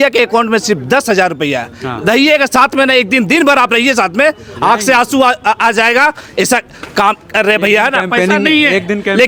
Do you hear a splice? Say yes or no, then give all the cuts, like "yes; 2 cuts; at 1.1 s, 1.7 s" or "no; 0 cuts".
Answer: no; 0 cuts